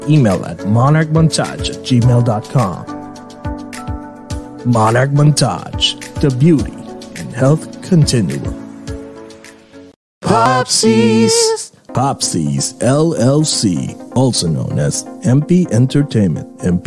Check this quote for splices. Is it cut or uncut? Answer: cut